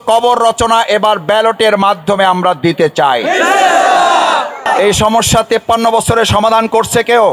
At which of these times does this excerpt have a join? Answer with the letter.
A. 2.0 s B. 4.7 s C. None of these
B